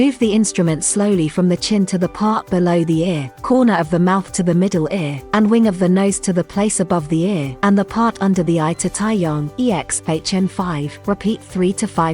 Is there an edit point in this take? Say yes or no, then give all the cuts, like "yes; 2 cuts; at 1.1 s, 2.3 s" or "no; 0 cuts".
yes; 5 cuts; at 3.3 s, 5.2 s, 7.5 s, 9.5 s, 10.9 s